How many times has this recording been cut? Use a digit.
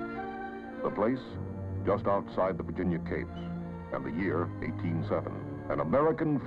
0